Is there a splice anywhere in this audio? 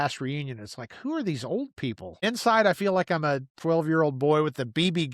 yes; 2 cuts; at 2.2 s, 3.5 s

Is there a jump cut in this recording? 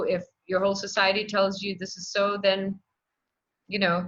no; 0 cuts

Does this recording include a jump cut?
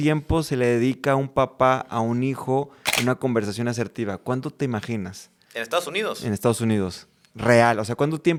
no; 0 cuts

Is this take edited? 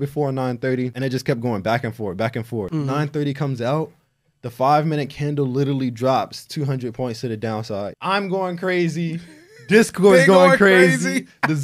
yes; 3 cuts; at 0.9 s, 2.7 s, 8.0 s

